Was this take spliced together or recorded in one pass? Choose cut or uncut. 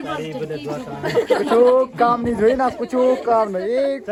uncut